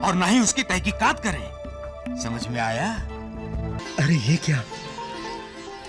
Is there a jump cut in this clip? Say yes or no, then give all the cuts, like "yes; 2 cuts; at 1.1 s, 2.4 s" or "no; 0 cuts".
yes; 1 cut; at 3.8 s